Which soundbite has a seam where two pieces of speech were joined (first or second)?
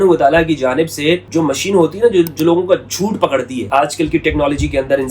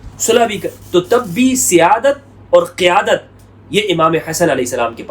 first